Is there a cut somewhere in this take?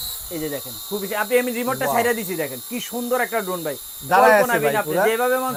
no; 0 cuts

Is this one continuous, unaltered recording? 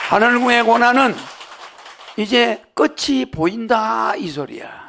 yes; 0 cuts

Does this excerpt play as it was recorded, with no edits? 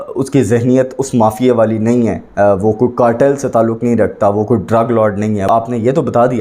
no; 1 cut; at 5.5 s

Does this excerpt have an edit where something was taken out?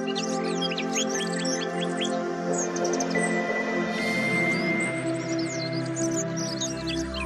no; 0 cuts

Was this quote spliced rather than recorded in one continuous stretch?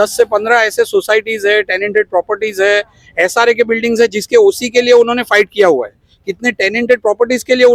no; 0 cuts

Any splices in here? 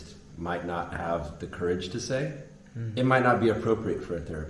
no; 0 cuts

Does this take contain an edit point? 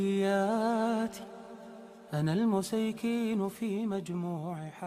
no; 0 cuts

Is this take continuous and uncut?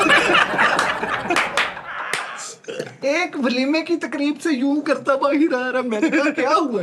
no; 1 cut; at 3.0 s

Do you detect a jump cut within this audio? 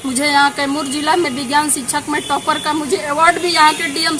no; 0 cuts

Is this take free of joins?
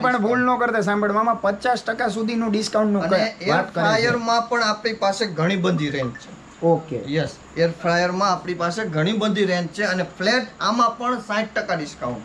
yes; 0 cuts

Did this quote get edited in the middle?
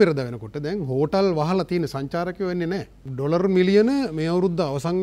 yes; 1 cut; at 3.0 s

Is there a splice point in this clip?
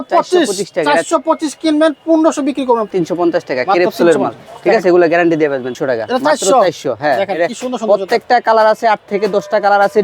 yes; 2 cuts; at 2.9 s, 5.7 s

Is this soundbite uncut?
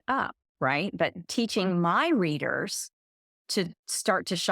no; 2 cuts; at 1.3 s, 3.4 s

